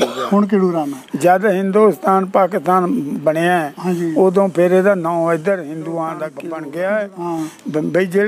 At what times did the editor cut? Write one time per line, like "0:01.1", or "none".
0:06.4